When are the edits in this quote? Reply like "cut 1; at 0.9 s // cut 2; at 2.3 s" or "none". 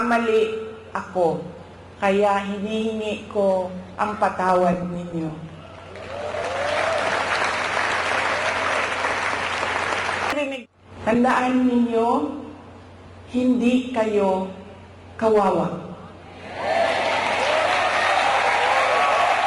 none